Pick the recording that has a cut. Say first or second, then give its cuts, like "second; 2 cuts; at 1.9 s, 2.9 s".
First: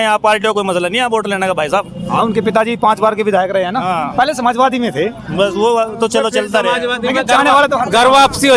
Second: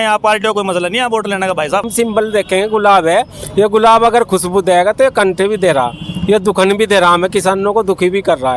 second; 1 cut; at 1.9 s